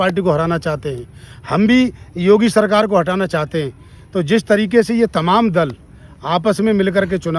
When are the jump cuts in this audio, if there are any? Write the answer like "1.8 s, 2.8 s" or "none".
none